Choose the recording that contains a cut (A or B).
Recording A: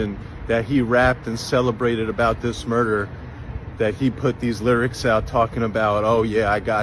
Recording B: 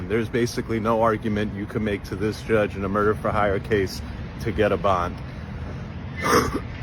B